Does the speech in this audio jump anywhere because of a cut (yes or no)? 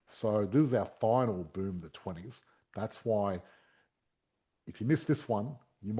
no